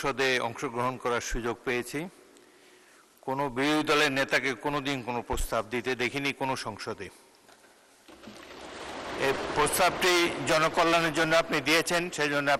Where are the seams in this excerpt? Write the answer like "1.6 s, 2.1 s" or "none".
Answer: none